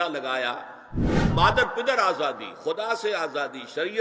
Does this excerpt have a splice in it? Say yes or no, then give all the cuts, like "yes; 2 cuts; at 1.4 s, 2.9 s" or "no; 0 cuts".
yes; 1 cut; at 1.2 s